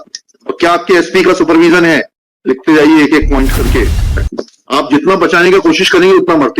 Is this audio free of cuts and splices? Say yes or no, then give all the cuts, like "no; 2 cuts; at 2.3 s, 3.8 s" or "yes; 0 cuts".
no; 1 cut; at 4.0 s